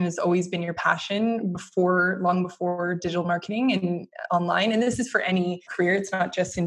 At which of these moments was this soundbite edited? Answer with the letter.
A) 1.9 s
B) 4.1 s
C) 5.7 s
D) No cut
C